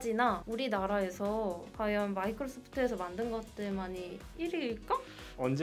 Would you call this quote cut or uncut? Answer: uncut